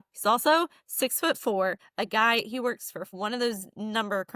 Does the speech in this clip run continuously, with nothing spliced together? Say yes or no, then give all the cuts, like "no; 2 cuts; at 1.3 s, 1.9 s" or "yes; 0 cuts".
no; 2 cuts; at 1.7 s, 3.1 s